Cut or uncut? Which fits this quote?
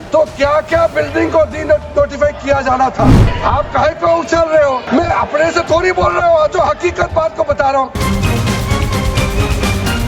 cut